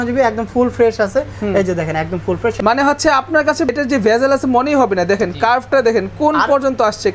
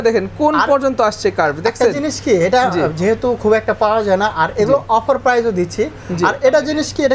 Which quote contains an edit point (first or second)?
first